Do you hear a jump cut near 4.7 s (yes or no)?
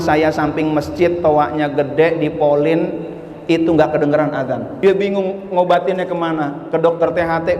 yes